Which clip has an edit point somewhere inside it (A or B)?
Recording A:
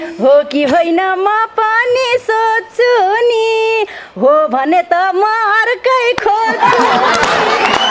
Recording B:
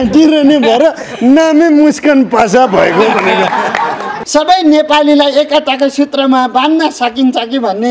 B